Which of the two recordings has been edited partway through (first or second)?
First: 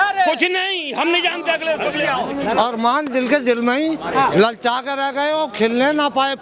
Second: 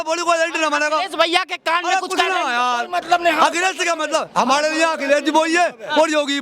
first